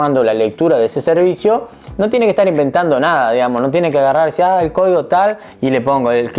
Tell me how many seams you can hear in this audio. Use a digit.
0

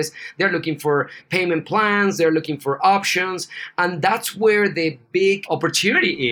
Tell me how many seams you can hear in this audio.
2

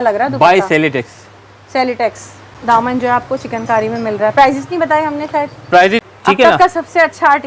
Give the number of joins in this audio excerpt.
2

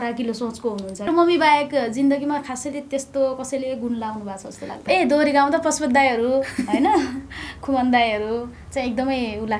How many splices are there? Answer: 2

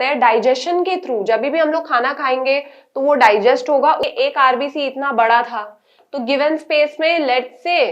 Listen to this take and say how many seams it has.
1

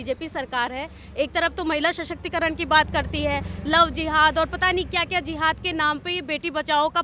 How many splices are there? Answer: 0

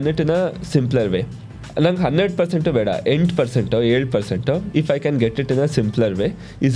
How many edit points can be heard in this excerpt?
2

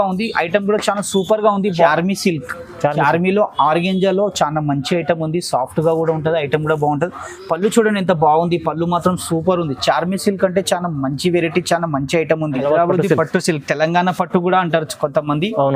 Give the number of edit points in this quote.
2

